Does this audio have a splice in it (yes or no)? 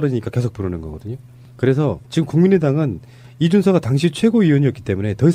no